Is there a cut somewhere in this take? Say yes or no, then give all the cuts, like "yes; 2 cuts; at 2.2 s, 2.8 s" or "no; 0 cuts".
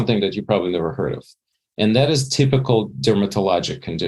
yes; 1 cut; at 2.9 s